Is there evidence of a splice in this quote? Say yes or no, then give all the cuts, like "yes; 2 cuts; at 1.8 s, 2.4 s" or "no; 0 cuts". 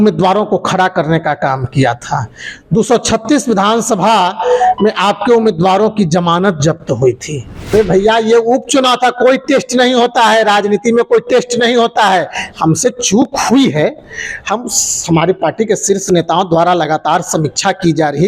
yes; 1 cut; at 7.7 s